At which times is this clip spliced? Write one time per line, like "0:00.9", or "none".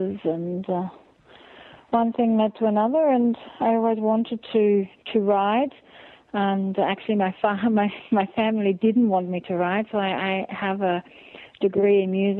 none